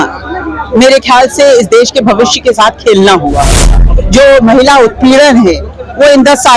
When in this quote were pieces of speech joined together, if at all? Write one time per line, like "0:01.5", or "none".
0:03.8

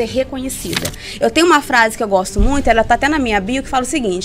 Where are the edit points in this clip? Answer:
0:01.0

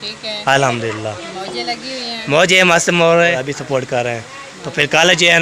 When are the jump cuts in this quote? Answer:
0:03.3

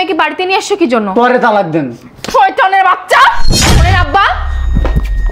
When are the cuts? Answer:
0:03.5

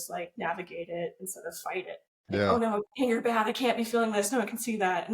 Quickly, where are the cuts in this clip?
0:02.5

